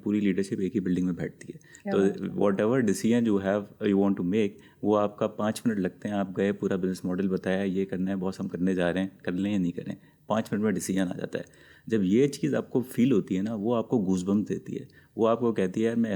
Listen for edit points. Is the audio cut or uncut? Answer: uncut